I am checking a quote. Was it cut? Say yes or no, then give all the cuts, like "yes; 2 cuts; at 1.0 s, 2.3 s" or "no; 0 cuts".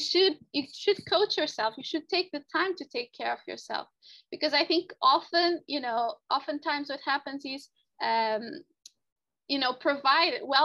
no; 0 cuts